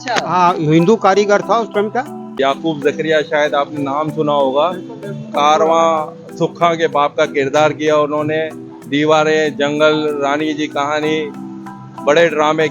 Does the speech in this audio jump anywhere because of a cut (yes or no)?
yes